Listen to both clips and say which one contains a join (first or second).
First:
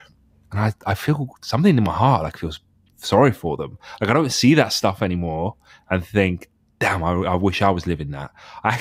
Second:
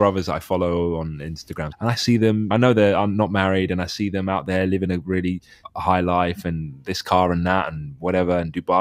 second